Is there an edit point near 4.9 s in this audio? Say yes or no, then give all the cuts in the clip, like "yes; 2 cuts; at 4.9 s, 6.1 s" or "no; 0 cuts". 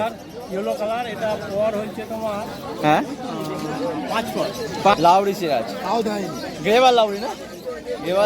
yes; 1 cut; at 4.9 s